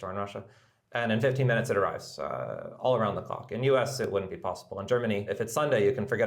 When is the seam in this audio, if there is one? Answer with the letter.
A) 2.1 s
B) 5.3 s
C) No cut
B